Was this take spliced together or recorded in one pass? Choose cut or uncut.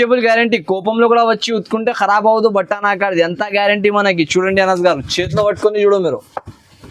uncut